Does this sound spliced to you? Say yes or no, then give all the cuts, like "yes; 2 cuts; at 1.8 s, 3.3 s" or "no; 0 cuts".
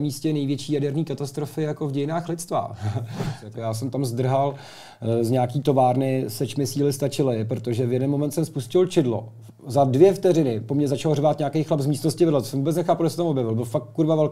yes; 1 cut; at 3.4 s